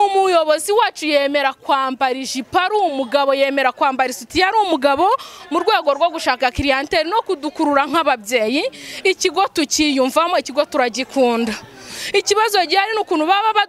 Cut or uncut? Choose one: uncut